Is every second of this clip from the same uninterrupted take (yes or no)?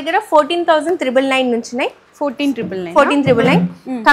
yes